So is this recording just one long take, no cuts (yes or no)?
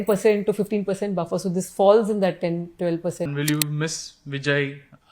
no